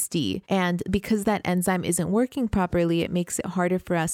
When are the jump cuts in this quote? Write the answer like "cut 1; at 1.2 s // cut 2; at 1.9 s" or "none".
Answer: none